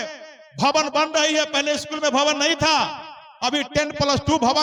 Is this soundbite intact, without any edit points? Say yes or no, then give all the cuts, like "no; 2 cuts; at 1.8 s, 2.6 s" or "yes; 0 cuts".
yes; 0 cuts